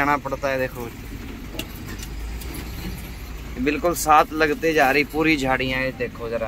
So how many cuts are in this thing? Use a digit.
0